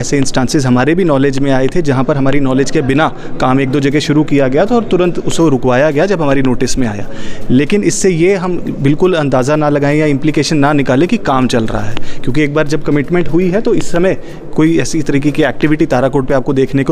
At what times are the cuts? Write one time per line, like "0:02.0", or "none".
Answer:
none